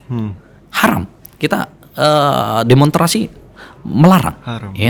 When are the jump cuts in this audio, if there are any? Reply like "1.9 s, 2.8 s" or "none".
none